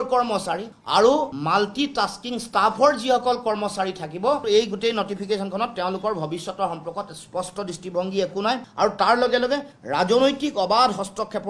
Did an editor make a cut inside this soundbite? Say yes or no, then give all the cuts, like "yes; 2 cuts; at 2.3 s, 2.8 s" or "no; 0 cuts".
no; 0 cuts